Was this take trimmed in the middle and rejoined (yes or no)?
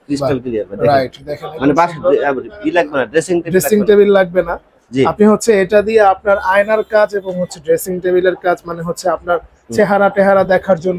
no